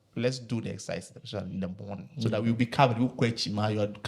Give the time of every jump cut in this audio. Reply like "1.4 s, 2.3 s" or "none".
none